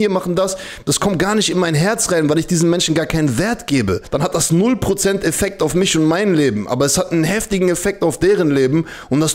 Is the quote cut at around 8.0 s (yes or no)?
no